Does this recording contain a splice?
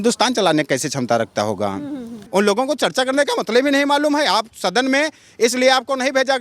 yes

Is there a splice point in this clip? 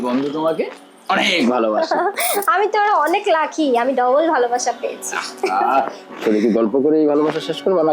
no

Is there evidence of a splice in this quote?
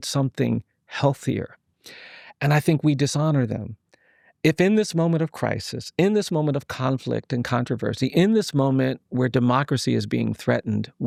no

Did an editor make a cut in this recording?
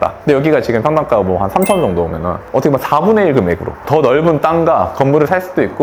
no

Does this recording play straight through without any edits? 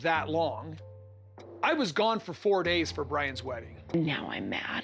no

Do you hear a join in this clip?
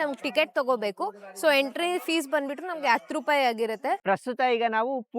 yes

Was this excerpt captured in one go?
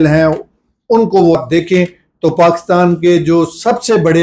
no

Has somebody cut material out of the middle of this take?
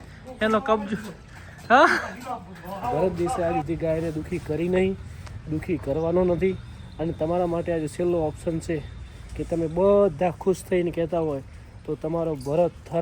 yes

